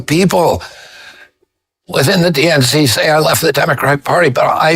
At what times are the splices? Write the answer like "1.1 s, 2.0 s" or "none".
none